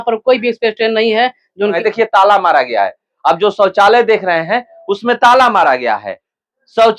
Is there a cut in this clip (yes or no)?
yes